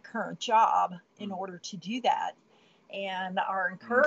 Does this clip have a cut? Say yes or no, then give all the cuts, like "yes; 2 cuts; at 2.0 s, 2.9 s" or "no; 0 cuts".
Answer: no; 0 cuts